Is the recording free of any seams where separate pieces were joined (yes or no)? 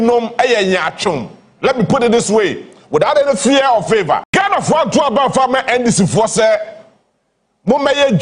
no